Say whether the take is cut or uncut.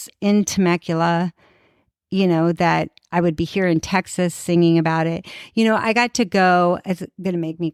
uncut